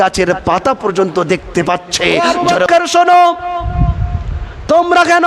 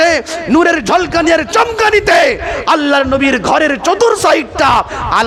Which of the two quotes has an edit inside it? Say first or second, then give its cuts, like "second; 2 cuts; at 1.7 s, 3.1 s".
first; 1 cut; at 2.7 s